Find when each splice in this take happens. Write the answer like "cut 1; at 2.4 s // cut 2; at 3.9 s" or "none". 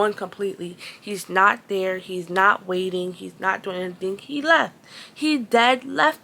none